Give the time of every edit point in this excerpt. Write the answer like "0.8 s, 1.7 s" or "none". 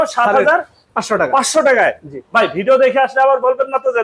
none